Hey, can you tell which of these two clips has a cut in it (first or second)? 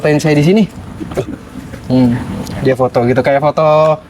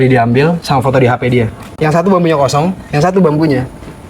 second